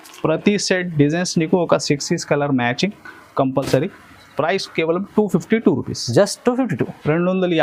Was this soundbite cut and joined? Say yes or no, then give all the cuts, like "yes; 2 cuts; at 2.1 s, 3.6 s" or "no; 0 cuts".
no; 0 cuts